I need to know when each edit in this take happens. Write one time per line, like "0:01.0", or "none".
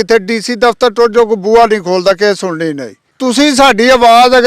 0:03.1